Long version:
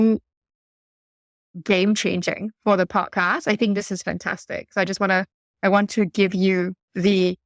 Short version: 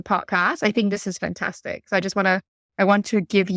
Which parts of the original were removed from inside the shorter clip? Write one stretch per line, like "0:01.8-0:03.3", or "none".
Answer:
none